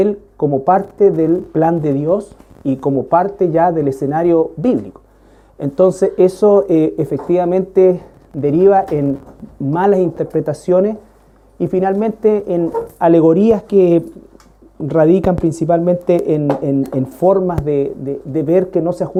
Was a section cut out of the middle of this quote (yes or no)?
no